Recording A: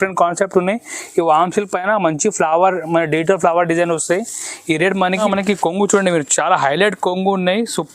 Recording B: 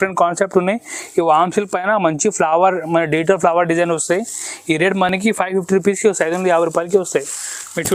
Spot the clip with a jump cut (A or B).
A